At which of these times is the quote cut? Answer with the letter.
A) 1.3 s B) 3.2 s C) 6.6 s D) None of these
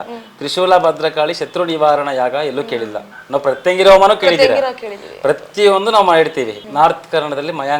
C